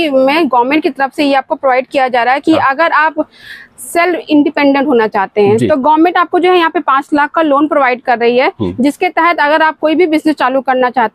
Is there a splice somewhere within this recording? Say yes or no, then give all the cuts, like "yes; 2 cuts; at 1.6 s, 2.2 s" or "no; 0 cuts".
no; 0 cuts